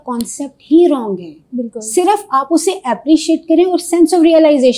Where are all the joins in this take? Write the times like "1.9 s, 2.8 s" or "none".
none